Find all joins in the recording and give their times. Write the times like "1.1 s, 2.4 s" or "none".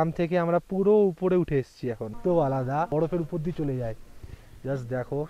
2.2 s